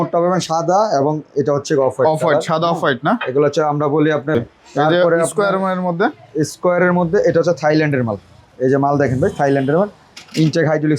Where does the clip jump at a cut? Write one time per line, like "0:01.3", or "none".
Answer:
0:04.4